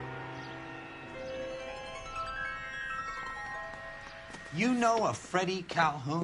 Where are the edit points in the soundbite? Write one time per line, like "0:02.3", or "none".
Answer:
0:04.5